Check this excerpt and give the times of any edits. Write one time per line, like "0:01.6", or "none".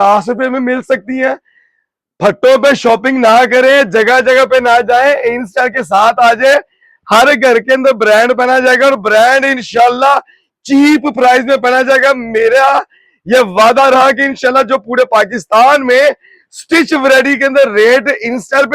none

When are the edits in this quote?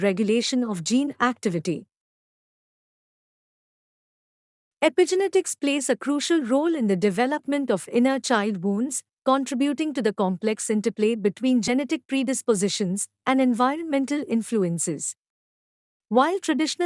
0:14.7

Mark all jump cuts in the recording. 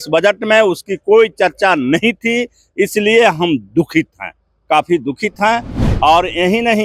none

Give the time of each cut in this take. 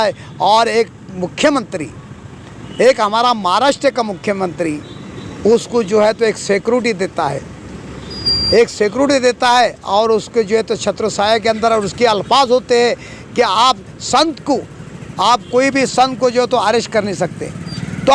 none

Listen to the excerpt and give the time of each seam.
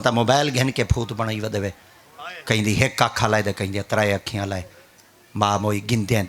none

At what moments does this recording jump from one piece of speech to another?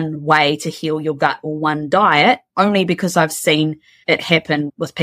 0:03.9

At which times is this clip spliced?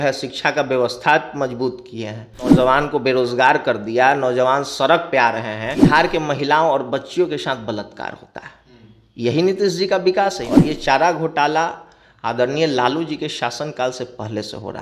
0:02.5
0:05.7
0:10.5

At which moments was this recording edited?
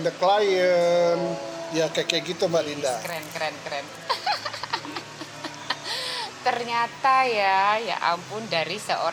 none

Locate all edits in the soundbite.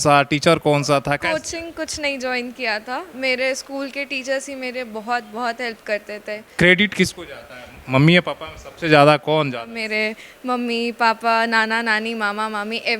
0:01.2
0:06.5
0:09.8

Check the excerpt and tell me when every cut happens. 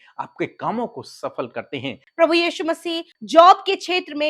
0:02.0
0:03.1

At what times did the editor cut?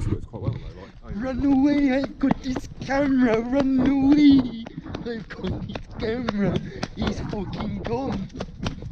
none

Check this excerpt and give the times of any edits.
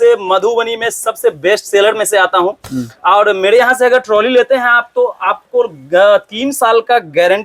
none

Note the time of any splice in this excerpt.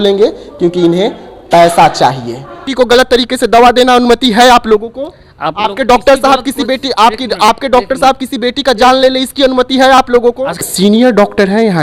0:02.7
0:10.6

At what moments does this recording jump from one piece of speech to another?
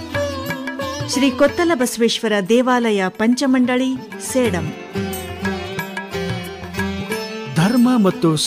none

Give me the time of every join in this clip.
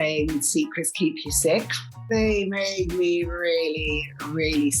0:02.0

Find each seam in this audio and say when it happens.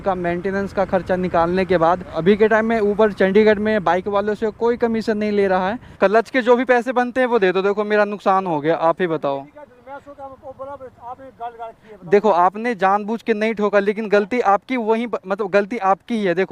0:02.2
0:05.8

